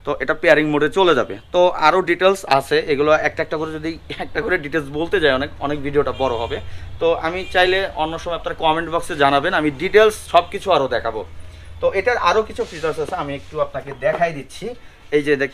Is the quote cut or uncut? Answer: uncut